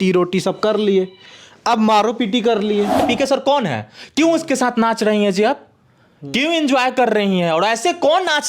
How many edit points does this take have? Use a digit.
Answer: 1